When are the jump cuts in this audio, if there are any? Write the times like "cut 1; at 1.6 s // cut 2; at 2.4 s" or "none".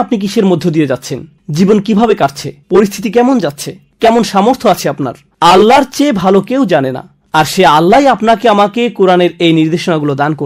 none